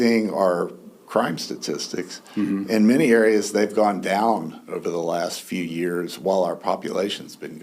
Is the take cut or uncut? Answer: uncut